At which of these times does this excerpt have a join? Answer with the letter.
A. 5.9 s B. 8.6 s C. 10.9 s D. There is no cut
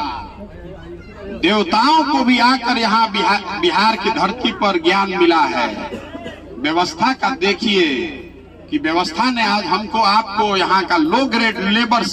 D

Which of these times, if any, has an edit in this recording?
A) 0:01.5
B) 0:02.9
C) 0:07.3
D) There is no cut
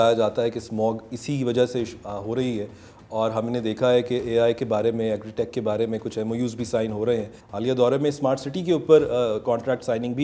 C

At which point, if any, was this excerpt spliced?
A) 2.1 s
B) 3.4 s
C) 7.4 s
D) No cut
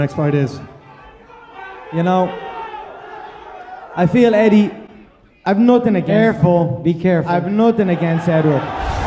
A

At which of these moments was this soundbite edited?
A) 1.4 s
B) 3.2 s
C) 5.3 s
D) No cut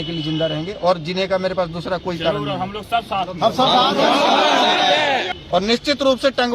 C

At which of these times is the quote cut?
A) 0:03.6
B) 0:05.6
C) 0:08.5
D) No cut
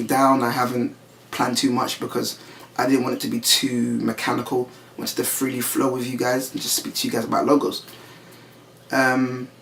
D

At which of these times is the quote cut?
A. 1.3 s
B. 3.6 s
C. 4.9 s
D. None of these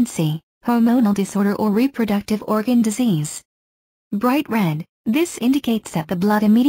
D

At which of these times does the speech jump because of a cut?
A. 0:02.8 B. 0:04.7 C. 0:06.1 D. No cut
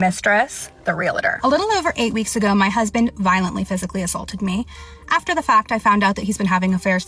D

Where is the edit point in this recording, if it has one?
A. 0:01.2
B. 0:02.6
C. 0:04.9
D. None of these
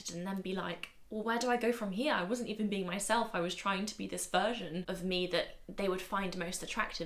C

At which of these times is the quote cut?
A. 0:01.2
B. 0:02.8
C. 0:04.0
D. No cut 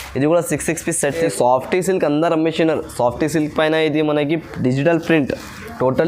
A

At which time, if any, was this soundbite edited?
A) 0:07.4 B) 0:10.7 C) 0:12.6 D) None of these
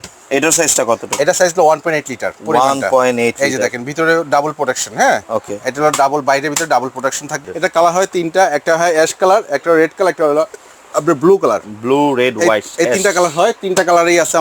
A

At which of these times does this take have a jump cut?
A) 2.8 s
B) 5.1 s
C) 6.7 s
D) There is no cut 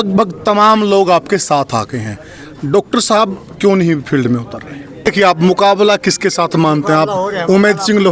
B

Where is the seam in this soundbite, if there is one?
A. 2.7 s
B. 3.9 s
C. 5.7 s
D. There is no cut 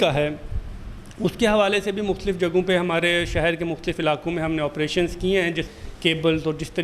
C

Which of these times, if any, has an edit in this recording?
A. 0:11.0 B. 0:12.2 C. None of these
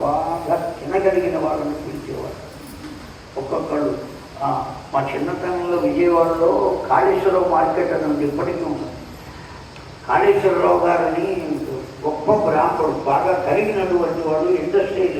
C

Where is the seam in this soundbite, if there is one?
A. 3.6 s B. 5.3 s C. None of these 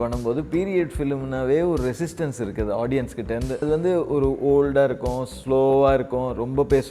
A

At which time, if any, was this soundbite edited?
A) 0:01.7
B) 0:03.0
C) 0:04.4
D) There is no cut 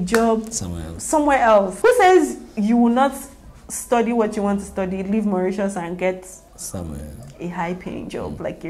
A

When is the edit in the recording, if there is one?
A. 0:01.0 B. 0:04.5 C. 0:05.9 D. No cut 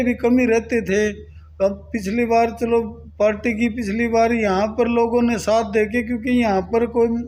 D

